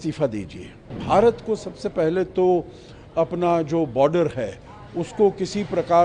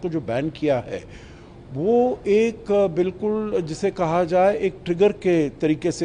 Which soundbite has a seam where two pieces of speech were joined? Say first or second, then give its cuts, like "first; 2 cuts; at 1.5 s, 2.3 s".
first; 1 cut; at 1.0 s